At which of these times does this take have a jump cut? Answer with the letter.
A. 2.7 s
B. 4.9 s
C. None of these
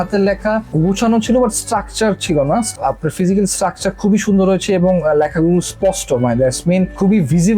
A